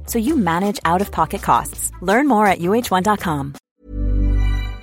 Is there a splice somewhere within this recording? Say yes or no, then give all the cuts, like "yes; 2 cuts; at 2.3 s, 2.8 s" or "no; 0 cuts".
yes; 1 cut; at 3.5 s